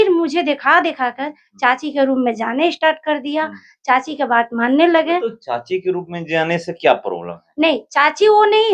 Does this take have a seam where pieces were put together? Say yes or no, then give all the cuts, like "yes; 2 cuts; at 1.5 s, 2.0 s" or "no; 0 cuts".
no; 0 cuts